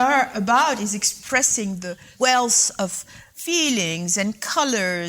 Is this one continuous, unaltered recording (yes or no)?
no